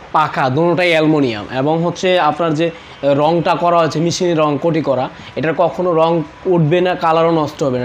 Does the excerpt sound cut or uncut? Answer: uncut